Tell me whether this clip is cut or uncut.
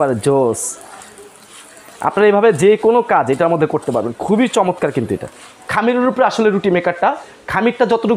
cut